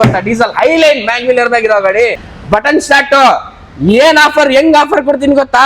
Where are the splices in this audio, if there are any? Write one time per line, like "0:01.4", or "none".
0:02.3